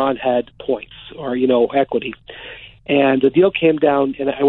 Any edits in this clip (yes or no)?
no